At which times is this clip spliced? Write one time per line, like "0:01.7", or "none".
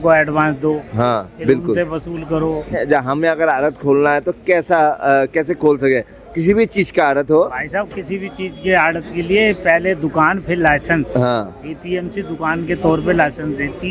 0:02.7